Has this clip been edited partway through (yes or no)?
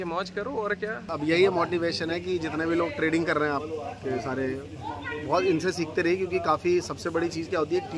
yes